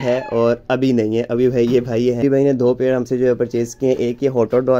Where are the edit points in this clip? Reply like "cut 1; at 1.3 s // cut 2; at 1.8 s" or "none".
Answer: cut 1; at 2.2 s